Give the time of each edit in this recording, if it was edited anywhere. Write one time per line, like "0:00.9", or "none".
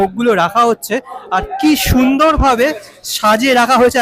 none